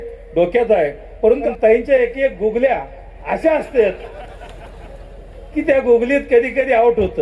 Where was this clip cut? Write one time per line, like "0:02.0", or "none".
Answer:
0:01.5